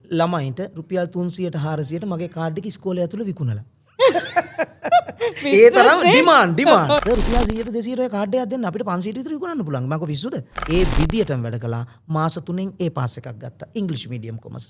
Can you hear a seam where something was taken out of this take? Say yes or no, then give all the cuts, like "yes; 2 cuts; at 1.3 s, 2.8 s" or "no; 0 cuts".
yes; 2 cuts; at 7.0 s, 10.6 s